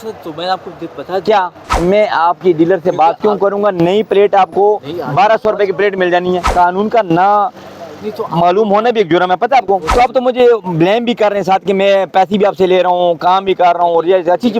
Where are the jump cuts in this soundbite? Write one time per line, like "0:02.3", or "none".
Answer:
0:01.6
0:06.5
0:09.9